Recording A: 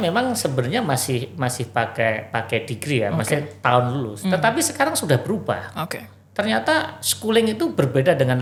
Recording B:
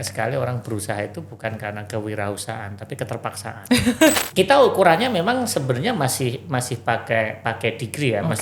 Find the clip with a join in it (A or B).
B